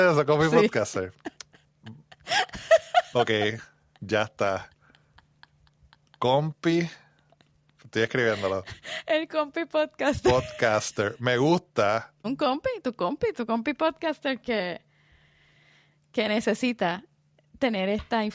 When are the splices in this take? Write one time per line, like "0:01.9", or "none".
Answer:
0:12.1